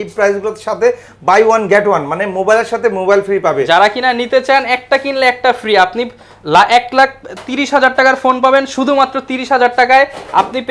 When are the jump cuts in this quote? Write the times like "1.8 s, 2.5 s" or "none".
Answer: none